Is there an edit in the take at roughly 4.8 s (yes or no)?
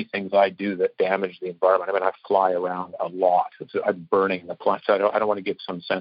yes